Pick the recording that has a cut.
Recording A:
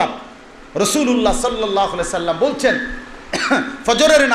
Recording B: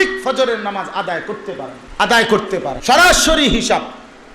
B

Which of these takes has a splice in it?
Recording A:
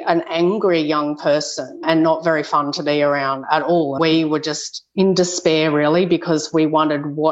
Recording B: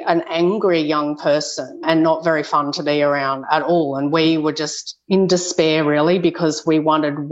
A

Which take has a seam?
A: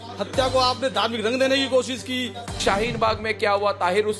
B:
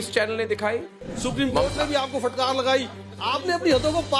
B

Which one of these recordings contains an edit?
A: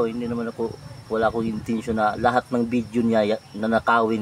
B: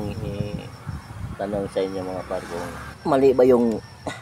B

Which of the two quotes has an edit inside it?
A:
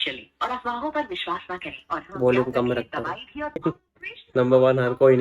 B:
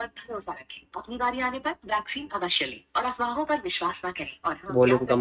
A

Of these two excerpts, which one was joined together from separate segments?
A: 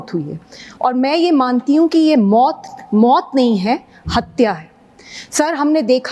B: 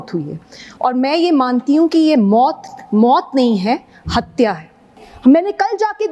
B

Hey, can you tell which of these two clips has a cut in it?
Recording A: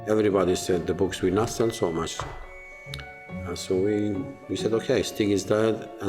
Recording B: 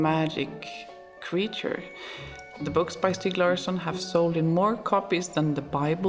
B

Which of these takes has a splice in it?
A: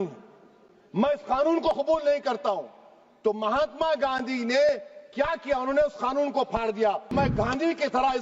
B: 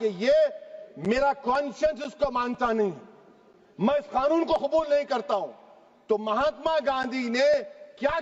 A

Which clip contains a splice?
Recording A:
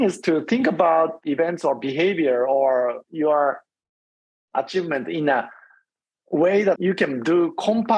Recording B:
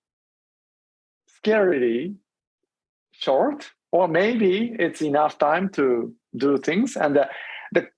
A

